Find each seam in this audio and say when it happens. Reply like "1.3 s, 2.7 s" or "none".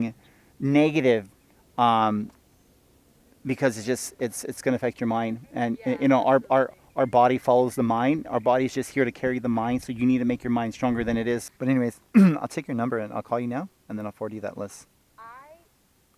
11.4 s